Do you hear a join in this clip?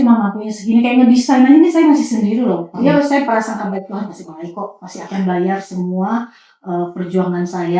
yes; 1 cut; at 2.7 s

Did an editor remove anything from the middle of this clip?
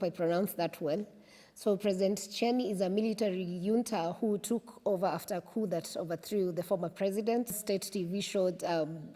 yes; 1 cut; at 7.6 s

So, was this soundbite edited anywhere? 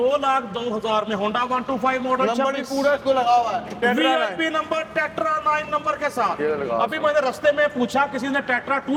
no; 0 cuts

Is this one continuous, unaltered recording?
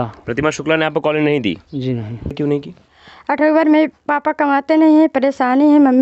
no; 1 cut; at 2.4 s

